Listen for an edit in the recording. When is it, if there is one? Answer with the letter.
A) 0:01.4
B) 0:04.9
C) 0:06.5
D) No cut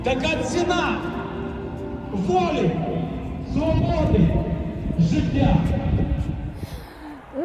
C